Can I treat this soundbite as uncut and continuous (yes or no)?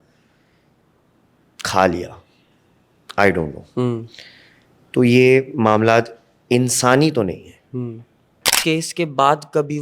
no